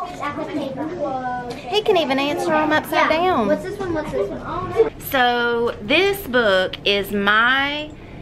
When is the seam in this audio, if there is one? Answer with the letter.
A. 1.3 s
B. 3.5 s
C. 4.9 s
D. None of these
C